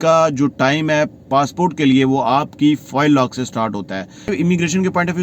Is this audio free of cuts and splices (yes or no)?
no